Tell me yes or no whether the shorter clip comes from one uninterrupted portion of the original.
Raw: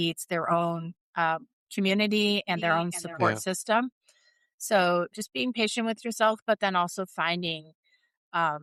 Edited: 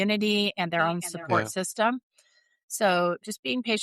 yes